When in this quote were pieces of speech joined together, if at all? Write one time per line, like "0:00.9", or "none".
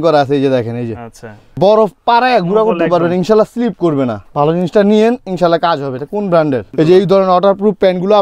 0:01.5
0:04.2
0:06.7

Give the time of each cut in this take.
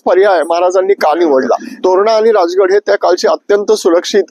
0:01.7

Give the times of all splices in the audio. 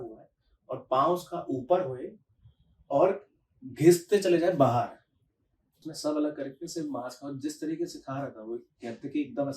0:05.9

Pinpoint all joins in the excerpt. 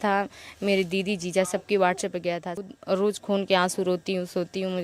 0:02.5

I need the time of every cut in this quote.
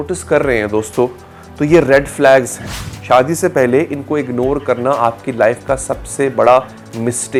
none

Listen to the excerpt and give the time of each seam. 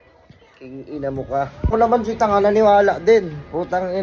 0:01.7

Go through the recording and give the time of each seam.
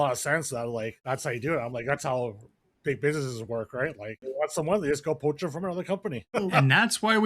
0:01.0
0:04.3
0:06.2

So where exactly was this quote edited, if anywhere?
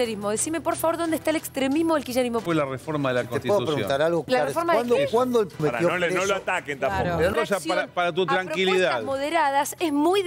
0:02.4
0:04.3
0:05.6
0:07.3

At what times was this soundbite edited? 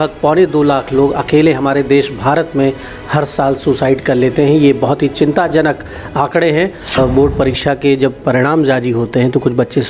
0:07.0

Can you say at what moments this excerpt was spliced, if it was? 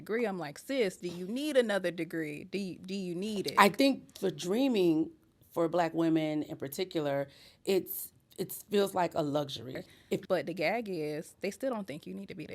0:03.5
0:10.2

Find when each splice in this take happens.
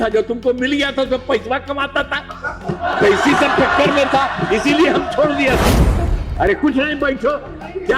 0:06.0

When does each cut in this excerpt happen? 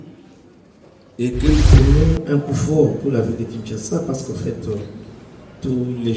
0:01.7

